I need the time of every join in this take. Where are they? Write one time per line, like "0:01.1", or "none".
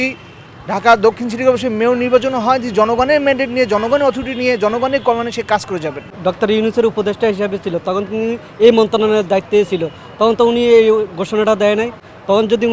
none